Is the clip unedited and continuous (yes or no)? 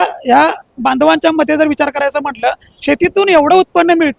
yes